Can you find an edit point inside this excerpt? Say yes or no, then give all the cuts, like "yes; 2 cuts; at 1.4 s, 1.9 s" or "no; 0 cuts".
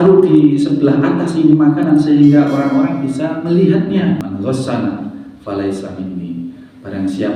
yes; 2 cuts; at 3.4 s, 4.2 s